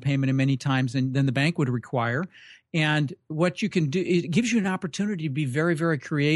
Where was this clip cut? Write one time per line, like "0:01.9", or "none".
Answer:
none